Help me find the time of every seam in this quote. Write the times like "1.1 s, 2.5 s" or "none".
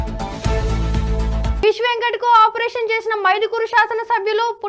1.5 s